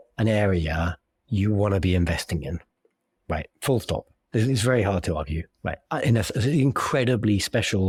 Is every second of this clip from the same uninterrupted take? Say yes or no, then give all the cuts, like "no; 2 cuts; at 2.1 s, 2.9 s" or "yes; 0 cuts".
yes; 0 cuts